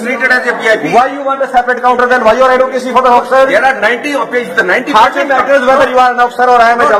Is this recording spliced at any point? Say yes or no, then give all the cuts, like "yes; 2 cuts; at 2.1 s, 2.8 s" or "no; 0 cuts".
no; 0 cuts